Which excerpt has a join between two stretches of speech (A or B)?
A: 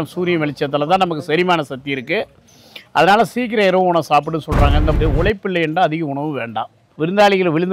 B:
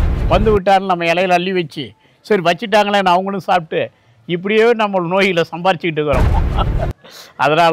A